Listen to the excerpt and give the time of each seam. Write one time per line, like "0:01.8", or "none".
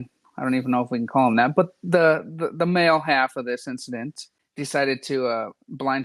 0:03.8

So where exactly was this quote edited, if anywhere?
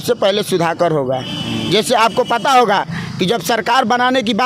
none

